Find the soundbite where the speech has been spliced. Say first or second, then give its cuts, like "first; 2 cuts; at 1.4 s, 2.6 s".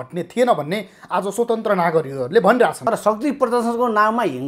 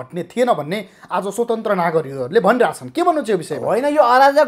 first; 1 cut; at 2.8 s